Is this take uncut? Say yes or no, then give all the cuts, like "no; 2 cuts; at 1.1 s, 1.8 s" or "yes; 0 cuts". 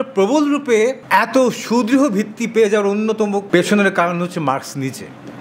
no; 1 cut; at 3.4 s